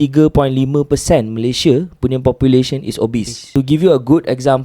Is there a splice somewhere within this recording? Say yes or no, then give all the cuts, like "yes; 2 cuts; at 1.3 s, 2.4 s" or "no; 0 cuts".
yes; 1 cut; at 3.4 s